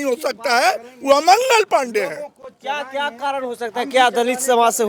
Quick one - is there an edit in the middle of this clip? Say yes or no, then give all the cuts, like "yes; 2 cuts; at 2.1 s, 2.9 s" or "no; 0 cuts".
no; 0 cuts